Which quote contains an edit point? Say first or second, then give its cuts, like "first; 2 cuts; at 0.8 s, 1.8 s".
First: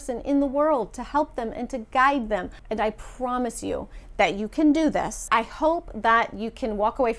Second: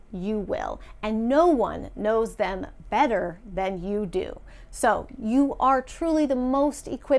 first; 2 cuts; at 2.6 s, 5.3 s